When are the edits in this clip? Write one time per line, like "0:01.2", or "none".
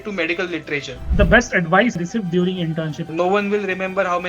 0:01.0
0:02.0
0:03.1